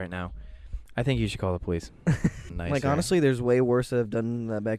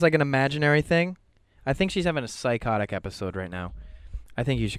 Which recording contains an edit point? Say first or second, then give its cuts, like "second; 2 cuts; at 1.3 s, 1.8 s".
first; 1 cut; at 2.5 s